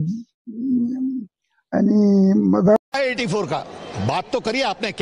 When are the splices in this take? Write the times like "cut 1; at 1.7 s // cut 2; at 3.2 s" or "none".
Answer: cut 1; at 2.8 s